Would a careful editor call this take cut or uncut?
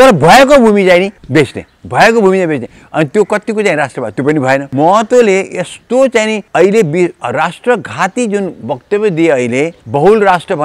cut